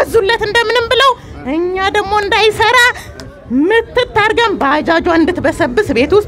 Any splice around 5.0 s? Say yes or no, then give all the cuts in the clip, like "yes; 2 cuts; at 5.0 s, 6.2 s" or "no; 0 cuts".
no; 0 cuts